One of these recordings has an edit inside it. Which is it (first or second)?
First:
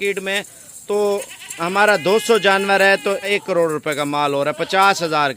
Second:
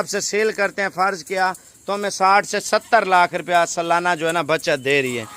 first